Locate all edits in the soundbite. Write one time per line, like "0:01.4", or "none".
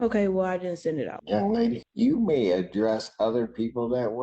0:01.2
0:01.9